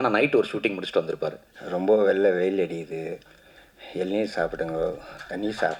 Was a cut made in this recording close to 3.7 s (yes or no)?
no